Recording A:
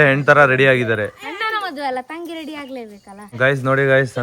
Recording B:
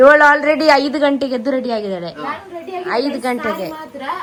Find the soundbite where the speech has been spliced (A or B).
A